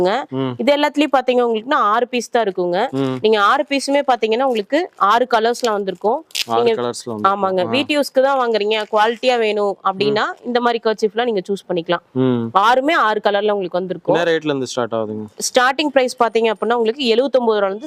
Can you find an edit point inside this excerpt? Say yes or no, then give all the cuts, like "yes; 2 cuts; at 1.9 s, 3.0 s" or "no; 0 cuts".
no; 0 cuts